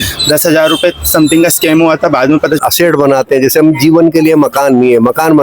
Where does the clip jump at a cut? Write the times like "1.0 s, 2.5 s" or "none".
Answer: 2.6 s